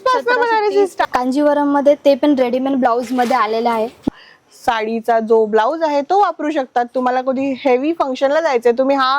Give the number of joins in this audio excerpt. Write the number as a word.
two